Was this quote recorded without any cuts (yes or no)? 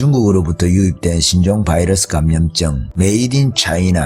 no